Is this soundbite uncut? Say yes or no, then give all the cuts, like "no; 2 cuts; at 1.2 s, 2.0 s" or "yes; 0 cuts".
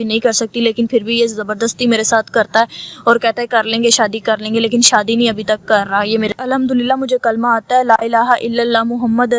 no; 1 cut; at 6.4 s